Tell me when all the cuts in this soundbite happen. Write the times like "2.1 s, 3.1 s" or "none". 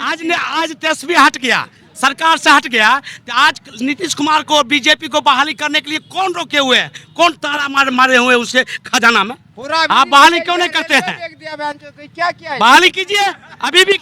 none